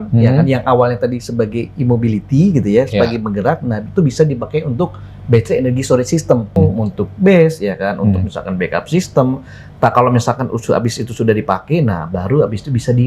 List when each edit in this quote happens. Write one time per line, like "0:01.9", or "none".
0:06.6

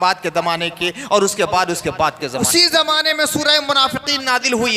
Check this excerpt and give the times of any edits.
0:02.5

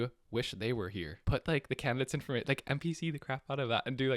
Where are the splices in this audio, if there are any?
0:01.1

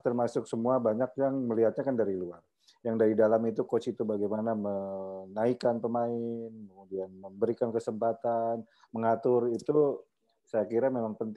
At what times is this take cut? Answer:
none

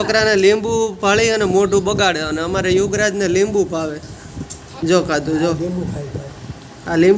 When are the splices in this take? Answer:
0:04.6

